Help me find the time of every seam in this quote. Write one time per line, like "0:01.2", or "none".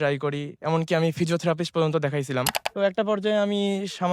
0:02.6